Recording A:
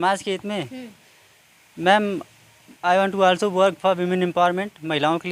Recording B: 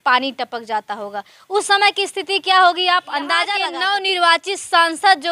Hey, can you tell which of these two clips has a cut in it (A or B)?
B